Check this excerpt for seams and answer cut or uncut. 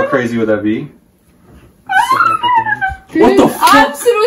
cut